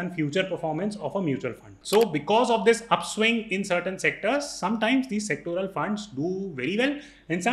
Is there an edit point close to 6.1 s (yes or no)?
no